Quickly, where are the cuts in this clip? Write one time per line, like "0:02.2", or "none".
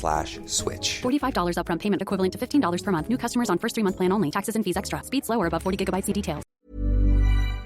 0:06.4

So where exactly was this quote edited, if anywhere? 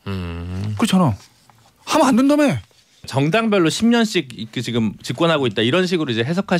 0:03.1

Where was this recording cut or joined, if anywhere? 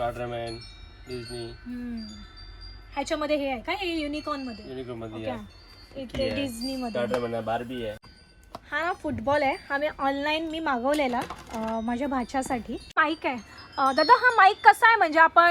0:08.1
0:13.0

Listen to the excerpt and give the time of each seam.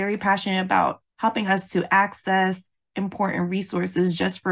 0:01.0

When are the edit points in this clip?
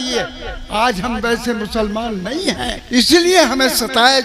0:02.8

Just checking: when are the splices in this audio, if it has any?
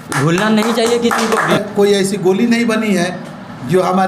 0:01.5

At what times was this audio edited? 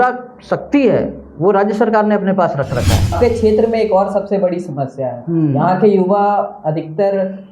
0:03.2

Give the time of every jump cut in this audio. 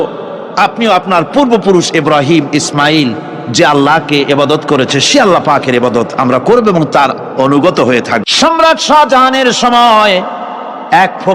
0:08.3

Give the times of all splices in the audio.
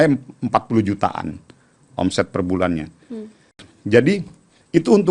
0:03.7

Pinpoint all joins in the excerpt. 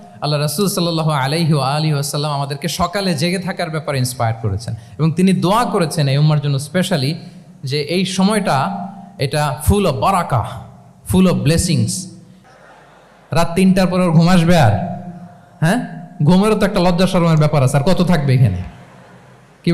0:12.6

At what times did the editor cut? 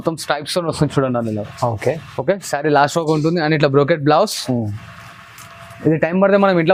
none

